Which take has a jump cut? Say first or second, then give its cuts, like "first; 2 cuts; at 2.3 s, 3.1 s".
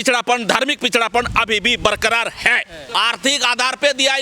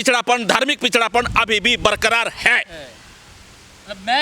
first; 1 cut; at 2.8 s